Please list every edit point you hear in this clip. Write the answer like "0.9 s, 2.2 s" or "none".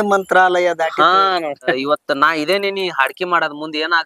1.8 s